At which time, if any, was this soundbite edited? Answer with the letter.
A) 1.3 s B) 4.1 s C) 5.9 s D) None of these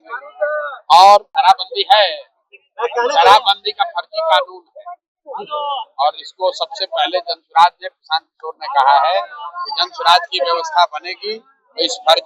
A